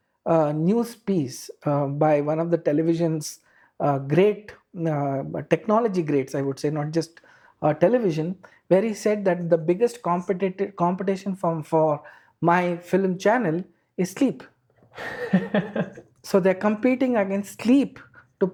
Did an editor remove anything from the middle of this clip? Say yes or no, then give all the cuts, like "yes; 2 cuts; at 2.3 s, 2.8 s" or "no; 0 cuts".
no; 0 cuts